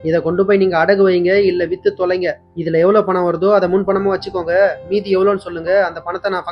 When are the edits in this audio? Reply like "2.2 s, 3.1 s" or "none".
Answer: none